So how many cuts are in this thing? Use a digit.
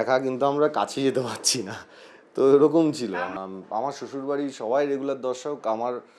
1